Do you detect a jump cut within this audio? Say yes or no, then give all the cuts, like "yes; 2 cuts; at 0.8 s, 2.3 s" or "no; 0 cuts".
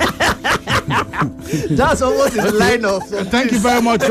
no; 0 cuts